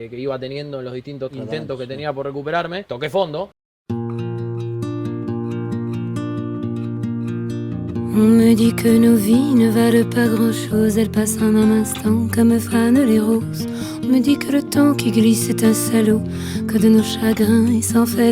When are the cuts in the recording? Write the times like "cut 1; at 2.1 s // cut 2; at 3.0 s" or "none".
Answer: cut 1; at 1.3 s // cut 2; at 2.9 s // cut 3; at 3.6 s